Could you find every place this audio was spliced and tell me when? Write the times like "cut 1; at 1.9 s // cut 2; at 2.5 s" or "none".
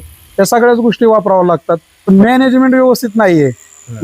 cut 1; at 2.1 s